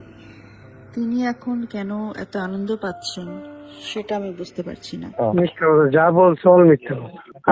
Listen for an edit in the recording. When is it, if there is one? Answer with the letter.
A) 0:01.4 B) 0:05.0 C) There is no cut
B